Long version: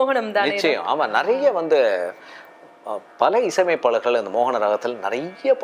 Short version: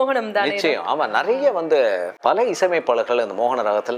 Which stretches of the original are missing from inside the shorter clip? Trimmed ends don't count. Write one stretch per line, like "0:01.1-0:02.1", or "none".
0:02.1-0:03.1